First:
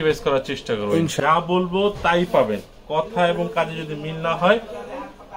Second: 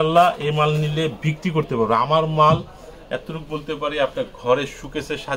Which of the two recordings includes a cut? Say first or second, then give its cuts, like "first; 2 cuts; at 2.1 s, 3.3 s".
first; 1 cut; at 1.2 s